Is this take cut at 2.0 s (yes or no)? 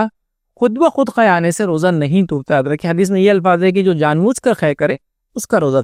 no